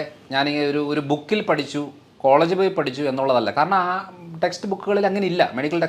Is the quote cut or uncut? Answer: uncut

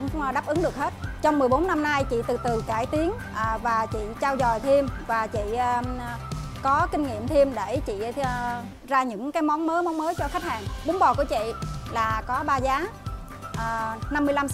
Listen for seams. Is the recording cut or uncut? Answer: uncut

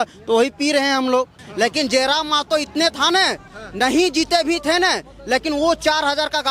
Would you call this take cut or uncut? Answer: cut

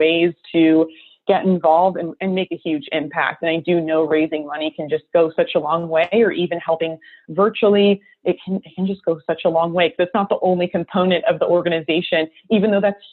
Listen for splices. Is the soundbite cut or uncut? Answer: uncut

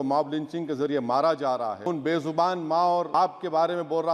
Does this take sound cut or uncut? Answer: cut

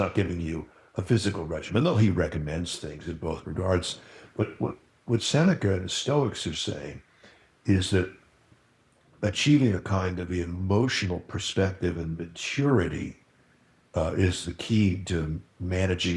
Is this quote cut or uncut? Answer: uncut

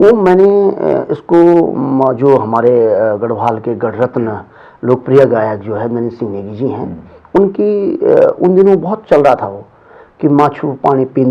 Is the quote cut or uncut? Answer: uncut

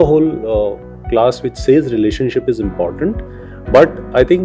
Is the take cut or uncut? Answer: uncut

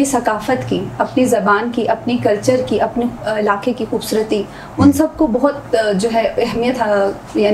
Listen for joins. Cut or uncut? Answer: uncut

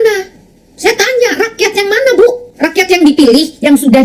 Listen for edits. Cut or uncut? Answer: cut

